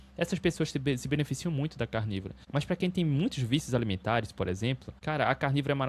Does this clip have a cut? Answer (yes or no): yes